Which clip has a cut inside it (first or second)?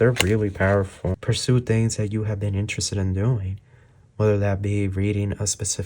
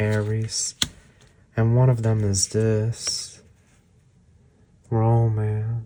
first